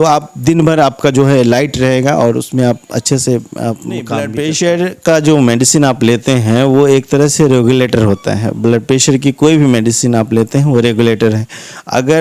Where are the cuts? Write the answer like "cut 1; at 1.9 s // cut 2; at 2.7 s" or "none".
cut 1; at 4.3 s

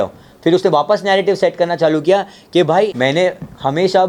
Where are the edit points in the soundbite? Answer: cut 1; at 2.9 s

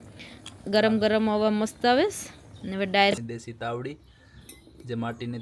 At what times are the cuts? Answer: cut 1; at 3.2 s

